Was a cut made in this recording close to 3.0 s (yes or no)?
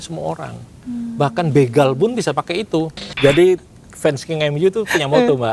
yes